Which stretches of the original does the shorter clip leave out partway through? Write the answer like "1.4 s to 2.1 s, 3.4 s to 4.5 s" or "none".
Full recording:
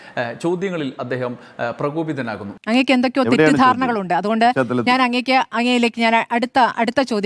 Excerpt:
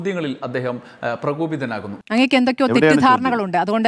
none